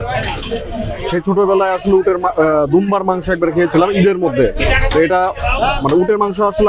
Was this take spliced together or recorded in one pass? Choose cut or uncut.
uncut